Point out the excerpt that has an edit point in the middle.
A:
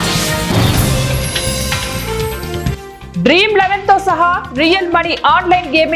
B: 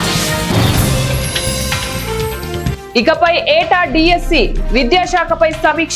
B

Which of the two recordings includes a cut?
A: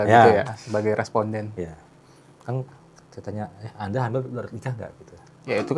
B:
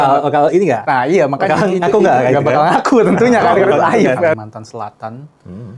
B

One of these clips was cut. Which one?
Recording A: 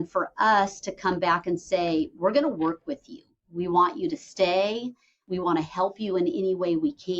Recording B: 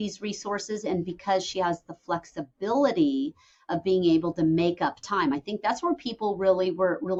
A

